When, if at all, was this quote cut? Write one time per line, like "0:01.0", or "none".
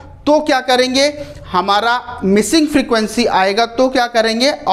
none